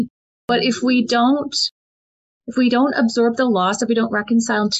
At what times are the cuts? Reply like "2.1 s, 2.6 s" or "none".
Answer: none